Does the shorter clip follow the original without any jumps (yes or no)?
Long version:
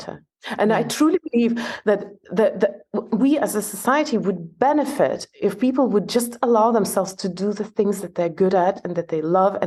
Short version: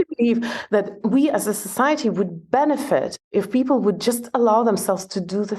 no